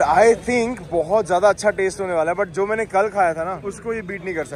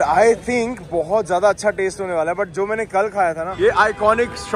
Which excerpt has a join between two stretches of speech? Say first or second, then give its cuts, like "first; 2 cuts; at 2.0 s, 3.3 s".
second; 1 cut; at 3.5 s